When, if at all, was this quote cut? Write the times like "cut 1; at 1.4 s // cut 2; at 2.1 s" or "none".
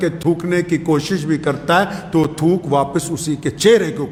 none